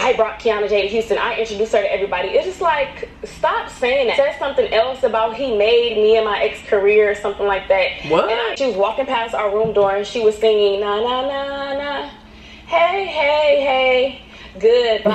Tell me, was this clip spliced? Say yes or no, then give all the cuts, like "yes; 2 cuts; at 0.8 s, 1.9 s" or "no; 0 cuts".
yes; 1 cut; at 8.6 s